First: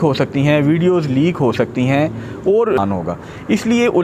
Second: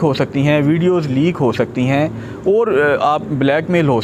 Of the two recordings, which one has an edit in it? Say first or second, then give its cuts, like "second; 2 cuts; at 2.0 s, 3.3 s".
first; 1 cut; at 2.8 s